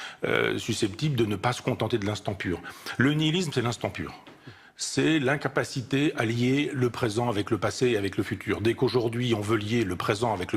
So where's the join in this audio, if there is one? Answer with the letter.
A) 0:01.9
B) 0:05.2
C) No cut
A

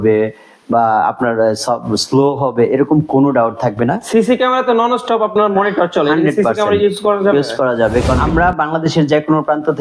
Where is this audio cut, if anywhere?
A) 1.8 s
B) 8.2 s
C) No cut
B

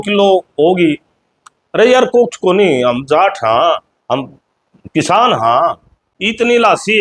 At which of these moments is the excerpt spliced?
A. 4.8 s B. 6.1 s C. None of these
B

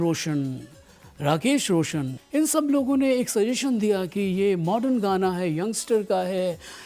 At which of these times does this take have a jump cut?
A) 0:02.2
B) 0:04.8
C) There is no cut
A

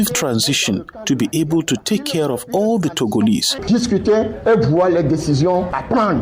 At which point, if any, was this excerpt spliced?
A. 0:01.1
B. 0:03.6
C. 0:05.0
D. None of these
B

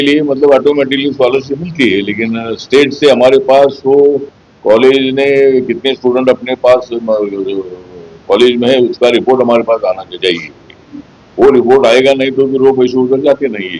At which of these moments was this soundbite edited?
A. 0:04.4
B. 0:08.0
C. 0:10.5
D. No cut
D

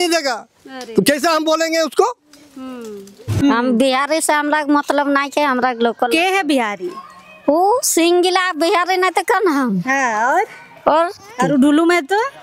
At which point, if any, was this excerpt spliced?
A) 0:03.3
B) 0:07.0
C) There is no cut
A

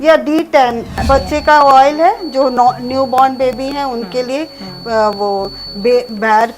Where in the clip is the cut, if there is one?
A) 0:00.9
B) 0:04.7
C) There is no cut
A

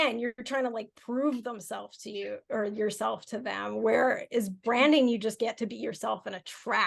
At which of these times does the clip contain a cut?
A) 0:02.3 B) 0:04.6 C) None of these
C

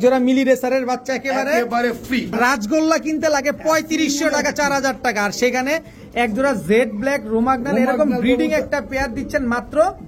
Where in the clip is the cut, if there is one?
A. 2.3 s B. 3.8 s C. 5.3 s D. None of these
A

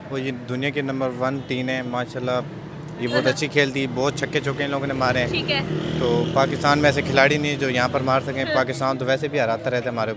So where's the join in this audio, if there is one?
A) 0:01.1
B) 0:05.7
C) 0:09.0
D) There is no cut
D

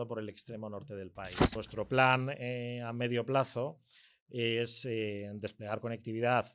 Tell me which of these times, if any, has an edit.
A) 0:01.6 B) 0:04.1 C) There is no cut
A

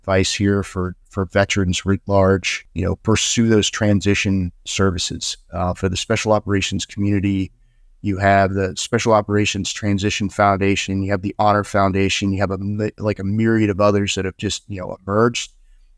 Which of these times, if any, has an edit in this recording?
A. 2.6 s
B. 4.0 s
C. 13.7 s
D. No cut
A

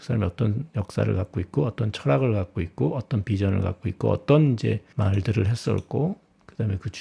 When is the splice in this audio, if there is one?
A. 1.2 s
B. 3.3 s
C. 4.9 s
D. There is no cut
C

